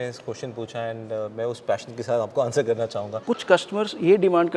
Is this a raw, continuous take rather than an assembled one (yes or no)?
no